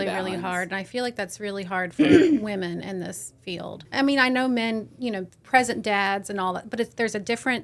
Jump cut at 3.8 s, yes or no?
yes